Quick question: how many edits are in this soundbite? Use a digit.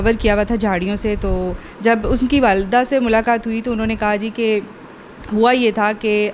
0